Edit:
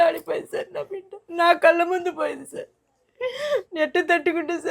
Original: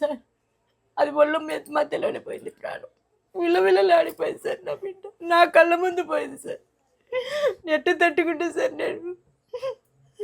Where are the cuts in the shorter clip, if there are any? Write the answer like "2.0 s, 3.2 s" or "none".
none